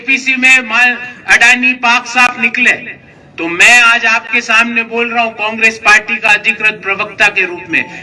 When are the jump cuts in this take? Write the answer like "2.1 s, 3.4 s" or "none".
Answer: none